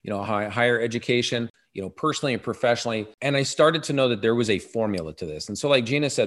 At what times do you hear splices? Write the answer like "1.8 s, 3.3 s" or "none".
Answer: 1.6 s, 3.1 s